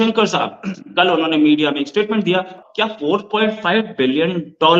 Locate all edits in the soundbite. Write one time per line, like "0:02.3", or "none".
0:02.6